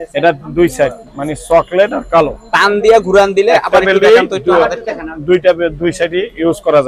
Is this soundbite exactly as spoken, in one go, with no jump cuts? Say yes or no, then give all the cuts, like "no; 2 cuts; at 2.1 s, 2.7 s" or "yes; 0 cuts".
yes; 0 cuts